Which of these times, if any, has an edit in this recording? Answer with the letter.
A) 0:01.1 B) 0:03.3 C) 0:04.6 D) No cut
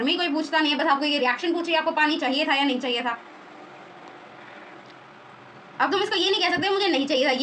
D